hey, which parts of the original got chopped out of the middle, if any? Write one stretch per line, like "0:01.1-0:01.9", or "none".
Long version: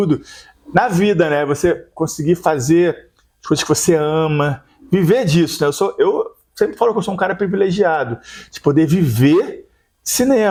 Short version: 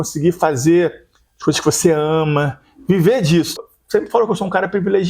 0:05.6-0:06.2